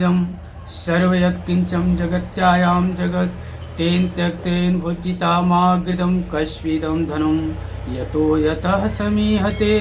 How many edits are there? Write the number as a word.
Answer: zero